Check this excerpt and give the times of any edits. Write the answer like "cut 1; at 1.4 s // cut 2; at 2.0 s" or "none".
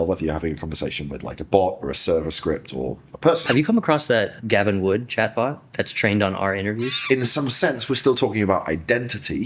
cut 1; at 3.4 s // cut 2; at 7.0 s

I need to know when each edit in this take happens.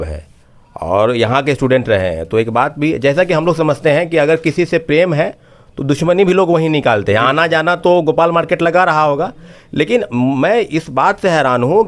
none

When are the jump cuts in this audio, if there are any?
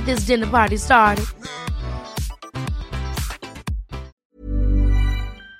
cut 1; at 4.2 s

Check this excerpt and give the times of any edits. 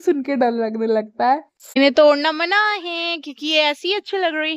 cut 1; at 1.8 s

